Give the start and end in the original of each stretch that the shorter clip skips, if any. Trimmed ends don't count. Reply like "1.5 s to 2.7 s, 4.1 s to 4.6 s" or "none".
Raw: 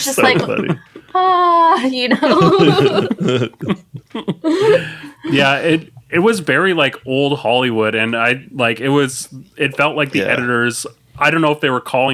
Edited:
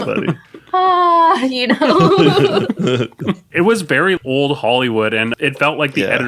3.9 s to 6.0 s, 6.8 s to 7.0 s, 8.1 s to 9.5 s